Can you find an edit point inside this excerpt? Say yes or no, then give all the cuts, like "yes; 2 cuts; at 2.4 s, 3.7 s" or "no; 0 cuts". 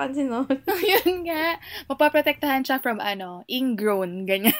no; 0 cuts